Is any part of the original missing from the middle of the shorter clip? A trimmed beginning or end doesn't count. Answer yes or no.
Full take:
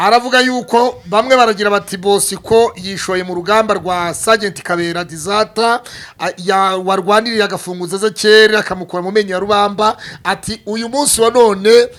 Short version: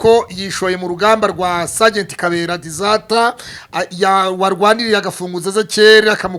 no